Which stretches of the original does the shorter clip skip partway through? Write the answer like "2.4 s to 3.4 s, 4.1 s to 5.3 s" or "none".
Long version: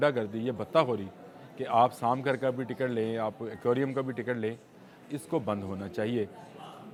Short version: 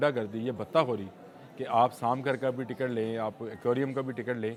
none